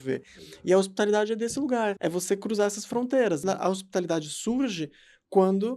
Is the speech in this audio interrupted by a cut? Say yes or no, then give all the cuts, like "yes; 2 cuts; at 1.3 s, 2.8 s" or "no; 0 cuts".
yes; 2 cuts; at 2.0 s, 3.4 s